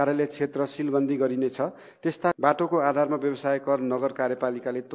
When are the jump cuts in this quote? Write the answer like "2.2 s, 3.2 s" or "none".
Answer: 2.4 s